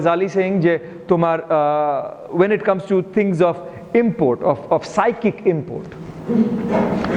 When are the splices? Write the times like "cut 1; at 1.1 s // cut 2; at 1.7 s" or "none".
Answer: none